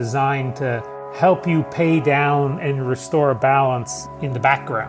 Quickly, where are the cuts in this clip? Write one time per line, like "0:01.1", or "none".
0:04.0